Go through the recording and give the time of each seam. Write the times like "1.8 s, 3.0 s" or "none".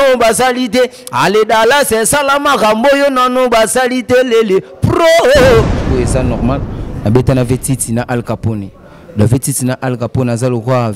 5.8 s